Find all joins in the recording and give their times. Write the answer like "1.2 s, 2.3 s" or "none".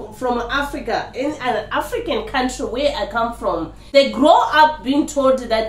3.8 s